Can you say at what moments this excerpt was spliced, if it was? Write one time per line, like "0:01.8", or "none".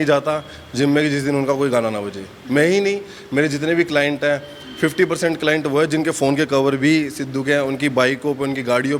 none